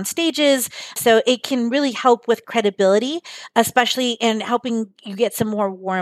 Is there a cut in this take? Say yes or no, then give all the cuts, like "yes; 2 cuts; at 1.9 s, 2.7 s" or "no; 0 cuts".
no; 0 cuts